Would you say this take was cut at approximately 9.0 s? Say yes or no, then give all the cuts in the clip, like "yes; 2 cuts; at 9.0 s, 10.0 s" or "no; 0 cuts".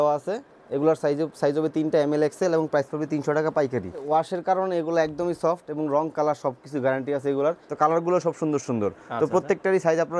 no; 2 cuts; at 4.0 s, 7.7 s